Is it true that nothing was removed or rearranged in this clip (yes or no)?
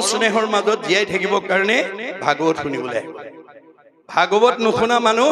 yes